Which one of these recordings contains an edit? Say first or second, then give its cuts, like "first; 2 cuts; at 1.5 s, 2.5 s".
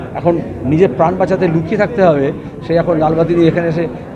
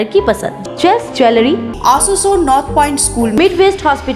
second; 1 cut; at 1.7 s